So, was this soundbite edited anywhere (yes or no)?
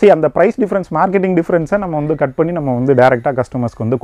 no